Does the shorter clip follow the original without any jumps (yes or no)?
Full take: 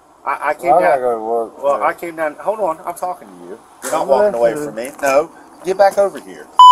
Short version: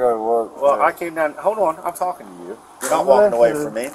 yes